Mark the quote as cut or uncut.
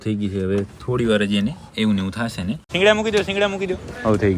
cut